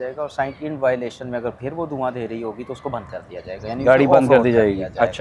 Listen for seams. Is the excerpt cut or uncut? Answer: uncut